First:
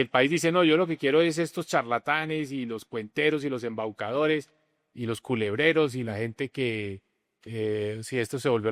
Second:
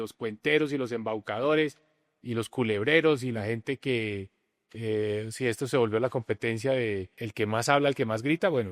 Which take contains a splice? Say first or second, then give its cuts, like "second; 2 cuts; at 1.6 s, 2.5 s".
second; 1 cut; at 7.2 s